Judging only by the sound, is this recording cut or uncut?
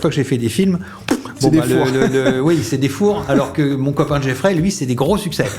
uncut